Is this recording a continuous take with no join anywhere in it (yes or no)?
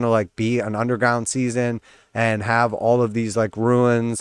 yes